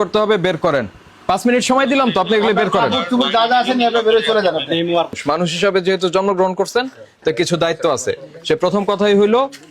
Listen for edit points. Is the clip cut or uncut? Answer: cut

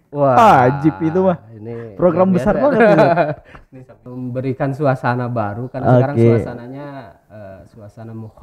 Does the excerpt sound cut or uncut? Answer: cut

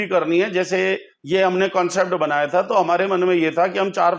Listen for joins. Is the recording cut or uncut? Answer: uncut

